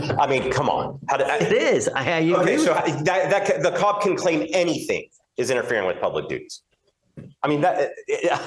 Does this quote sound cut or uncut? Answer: uncut